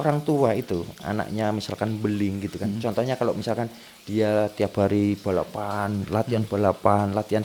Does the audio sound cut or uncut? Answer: uncut